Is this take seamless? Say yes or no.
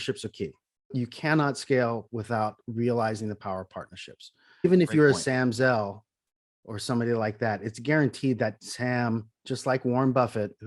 no